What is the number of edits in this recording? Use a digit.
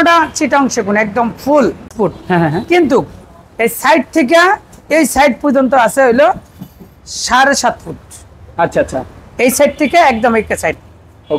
1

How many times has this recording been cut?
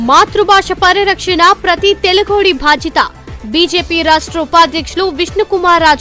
0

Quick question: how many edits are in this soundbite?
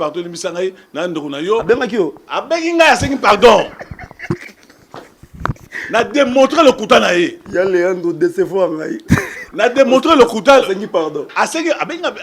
0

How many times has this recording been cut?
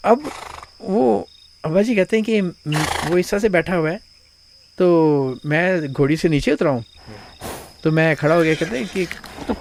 0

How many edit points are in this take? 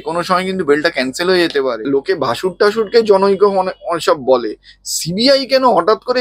1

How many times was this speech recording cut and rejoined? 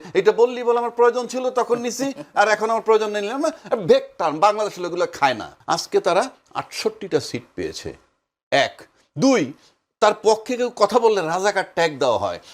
1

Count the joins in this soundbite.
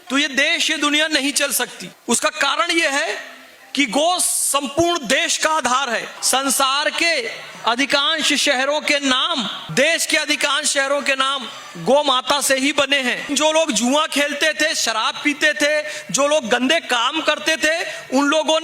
3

